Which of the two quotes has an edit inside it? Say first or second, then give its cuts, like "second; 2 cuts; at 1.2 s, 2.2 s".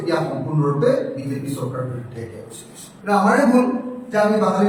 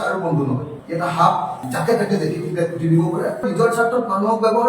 second; 1 cut; at 3.5 s